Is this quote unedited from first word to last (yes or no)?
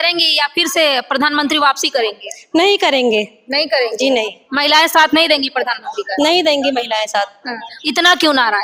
yes